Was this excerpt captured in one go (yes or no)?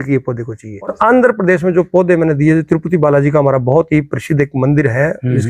no